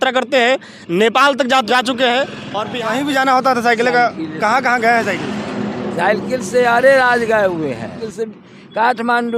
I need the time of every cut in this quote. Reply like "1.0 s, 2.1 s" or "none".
1.7 s, 2.6 s, 8.1 s